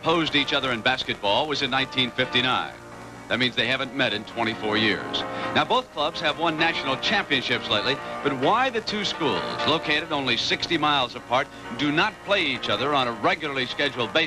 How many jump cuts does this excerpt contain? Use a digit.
0